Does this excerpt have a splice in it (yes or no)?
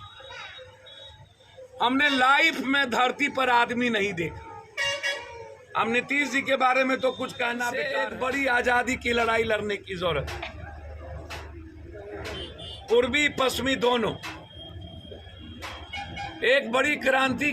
yes